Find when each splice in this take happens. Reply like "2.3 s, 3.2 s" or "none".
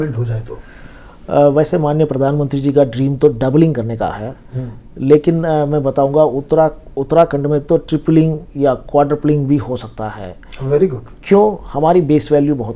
none